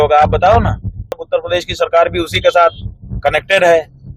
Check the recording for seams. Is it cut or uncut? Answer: cut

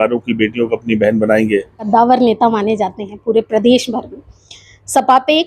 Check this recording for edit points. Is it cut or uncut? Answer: cut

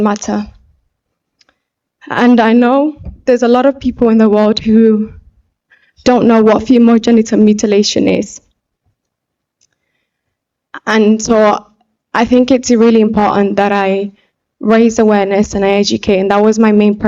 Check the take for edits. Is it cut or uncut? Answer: uncut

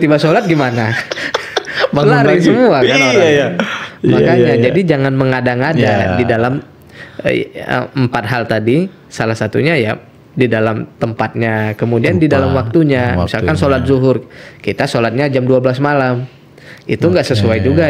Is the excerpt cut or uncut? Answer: uncut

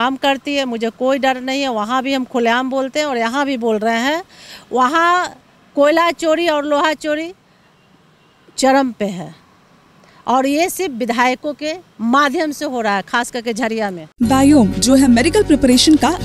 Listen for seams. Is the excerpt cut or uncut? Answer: uncut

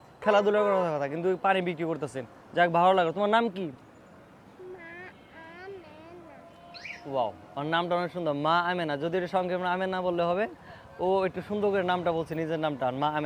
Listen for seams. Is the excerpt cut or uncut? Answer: uncut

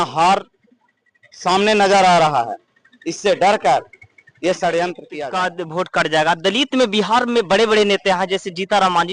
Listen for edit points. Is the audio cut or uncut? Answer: cut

